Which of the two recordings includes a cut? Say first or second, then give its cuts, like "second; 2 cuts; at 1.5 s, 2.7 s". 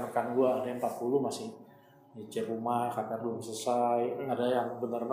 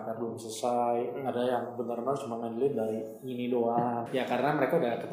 second; 1 cut; at 4.1 s